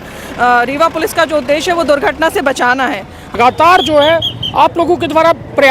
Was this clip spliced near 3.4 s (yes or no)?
yes